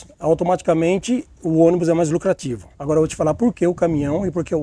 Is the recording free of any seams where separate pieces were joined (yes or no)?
yes